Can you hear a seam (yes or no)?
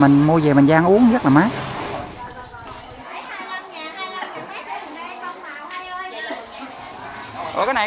yes